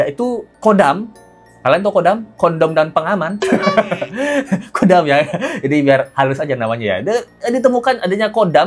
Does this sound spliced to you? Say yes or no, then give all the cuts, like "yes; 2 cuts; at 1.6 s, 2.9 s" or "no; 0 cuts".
no; 0 cuts